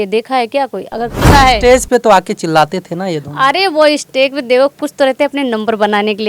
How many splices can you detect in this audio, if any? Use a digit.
1